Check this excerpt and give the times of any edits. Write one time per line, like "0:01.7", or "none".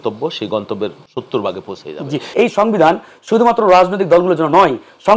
0:01.0
0:02.3